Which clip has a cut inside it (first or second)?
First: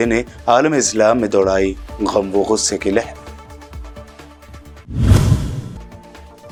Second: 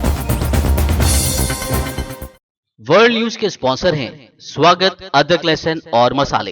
second